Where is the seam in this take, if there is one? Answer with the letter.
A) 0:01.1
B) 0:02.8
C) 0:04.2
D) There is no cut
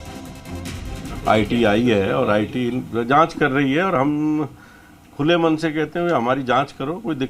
A